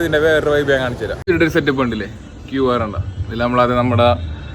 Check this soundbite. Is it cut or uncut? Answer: cut